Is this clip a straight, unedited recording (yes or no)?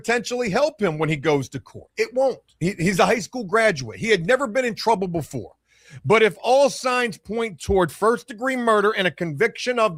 yes